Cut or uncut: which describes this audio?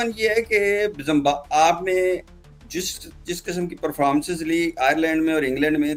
uncut